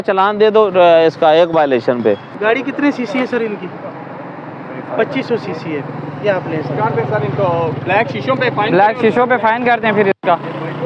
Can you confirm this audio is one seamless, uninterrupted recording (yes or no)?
yes